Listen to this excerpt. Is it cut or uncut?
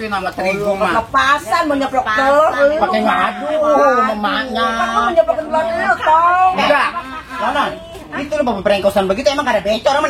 uncut